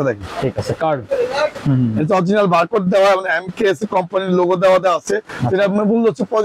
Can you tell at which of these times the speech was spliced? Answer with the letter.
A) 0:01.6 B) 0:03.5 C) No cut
A